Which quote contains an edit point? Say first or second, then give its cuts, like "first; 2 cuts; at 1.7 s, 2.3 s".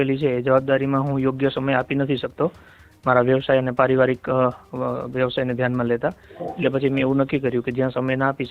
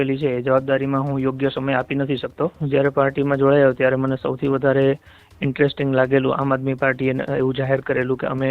second; 1 cut; at 2.6 s